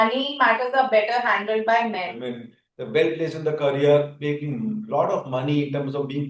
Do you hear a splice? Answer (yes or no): yes